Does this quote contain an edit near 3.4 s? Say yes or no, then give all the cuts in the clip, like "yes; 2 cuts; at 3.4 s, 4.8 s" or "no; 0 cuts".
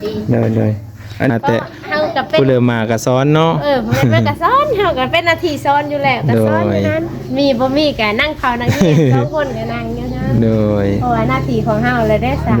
no; 1 cut; at 1.3 s